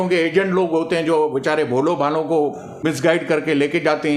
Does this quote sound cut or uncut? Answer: cut